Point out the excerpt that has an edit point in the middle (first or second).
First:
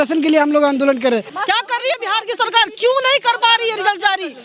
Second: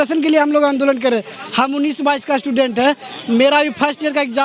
first